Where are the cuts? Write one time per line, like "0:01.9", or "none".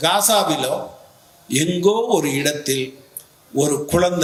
none